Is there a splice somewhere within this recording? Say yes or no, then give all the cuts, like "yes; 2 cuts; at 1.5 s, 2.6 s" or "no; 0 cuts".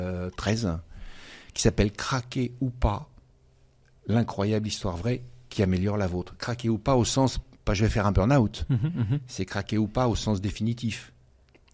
no; 0 cuts